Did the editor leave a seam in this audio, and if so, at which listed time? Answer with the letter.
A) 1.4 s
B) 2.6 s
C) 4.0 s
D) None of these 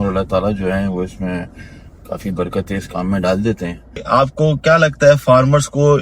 C